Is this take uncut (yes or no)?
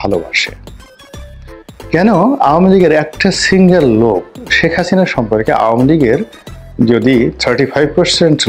no